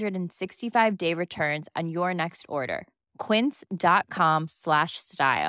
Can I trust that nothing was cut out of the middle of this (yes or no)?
yes